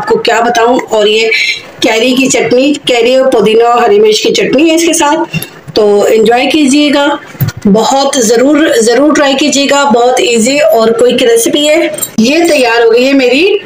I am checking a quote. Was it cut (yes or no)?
yes